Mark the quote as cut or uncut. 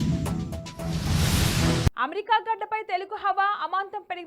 cut